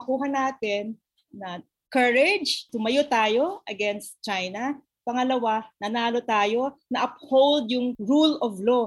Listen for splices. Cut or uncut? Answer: cut